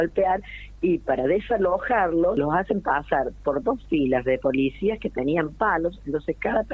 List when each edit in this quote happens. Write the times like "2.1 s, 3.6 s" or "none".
2.4 s